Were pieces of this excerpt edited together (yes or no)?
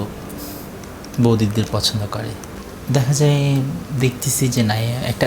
yes